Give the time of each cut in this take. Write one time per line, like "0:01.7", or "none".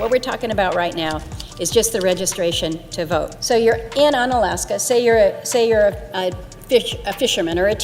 none